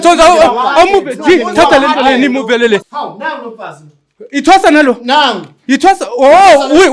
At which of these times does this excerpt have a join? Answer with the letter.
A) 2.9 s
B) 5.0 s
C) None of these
A